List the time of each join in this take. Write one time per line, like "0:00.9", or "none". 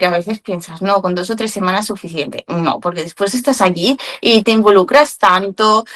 0:04.4